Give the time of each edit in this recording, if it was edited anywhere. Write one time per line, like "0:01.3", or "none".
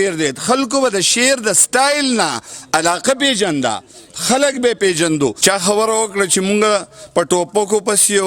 0:05.4